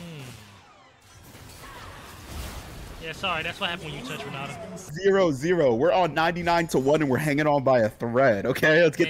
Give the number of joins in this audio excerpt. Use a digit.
1